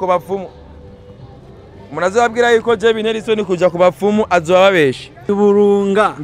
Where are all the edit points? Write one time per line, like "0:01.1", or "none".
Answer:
0:05.3